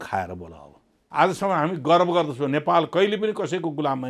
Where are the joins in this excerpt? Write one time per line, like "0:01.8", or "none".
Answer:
0:01.0

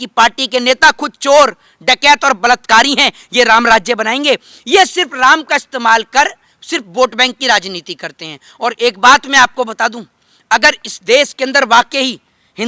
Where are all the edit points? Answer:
none

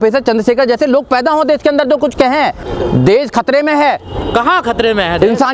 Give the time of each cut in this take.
0:02.6

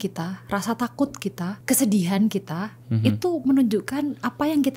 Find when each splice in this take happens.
0:01.6

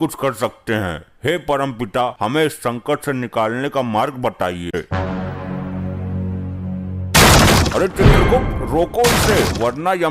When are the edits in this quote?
0:04.8

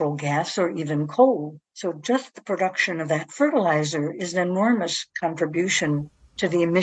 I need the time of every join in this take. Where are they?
none

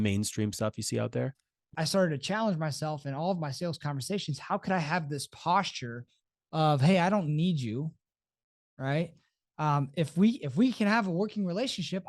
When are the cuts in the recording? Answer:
0:01.7

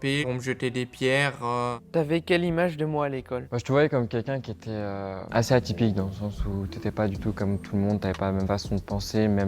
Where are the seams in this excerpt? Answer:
0:01.7
0:03.5
0:05.2

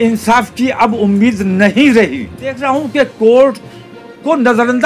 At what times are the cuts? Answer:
0:02.6

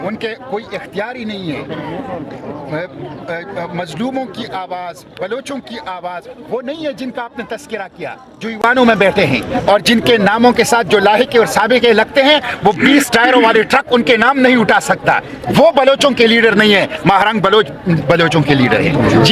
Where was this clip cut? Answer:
none

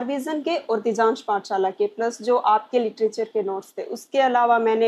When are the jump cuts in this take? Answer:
none

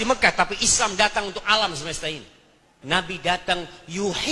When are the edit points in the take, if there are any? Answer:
0:02.7

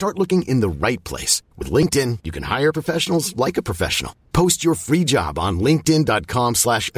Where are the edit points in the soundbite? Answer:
none

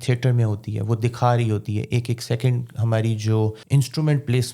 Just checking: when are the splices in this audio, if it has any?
0:03.6

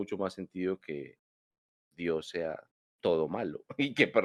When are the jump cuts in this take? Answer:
none

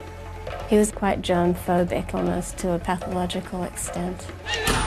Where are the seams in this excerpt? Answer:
0:01.5

